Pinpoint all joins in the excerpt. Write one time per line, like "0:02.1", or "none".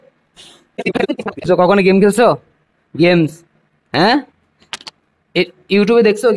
none